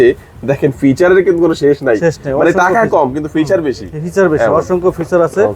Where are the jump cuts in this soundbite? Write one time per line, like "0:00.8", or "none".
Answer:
none